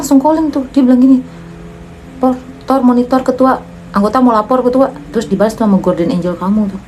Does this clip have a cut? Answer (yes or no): no